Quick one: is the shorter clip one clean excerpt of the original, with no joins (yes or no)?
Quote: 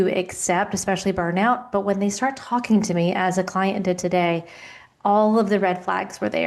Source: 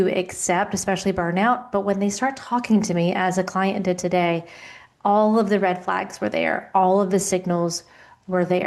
yes